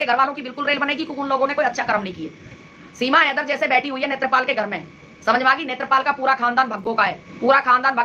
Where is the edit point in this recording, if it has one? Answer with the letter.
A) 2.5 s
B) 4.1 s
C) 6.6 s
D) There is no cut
A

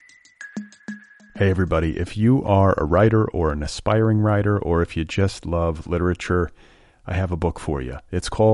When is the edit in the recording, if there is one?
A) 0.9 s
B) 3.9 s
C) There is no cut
A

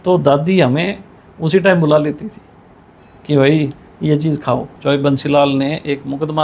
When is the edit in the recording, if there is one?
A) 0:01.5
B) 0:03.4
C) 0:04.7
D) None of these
C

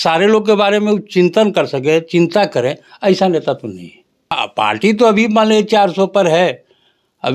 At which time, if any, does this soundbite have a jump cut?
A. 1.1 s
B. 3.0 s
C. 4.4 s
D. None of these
C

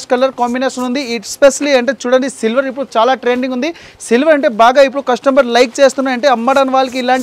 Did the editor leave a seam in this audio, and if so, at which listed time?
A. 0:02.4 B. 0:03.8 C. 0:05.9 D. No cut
D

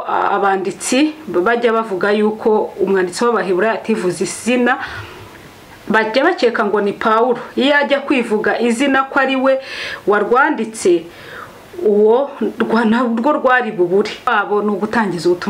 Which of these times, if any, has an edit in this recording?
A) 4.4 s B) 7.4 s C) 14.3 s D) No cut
C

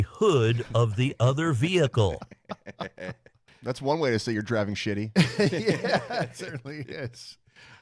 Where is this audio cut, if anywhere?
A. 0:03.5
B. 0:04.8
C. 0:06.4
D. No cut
A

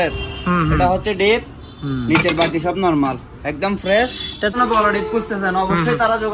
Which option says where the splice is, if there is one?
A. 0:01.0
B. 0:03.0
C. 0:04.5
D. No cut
C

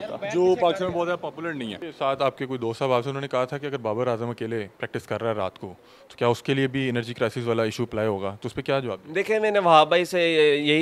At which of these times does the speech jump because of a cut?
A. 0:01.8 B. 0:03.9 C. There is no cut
A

